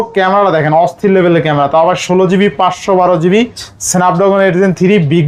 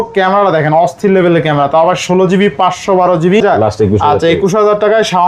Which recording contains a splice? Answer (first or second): second